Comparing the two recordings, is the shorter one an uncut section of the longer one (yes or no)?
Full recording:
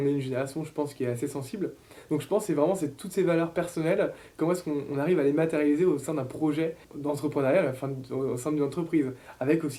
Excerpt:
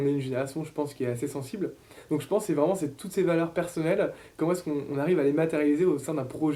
yes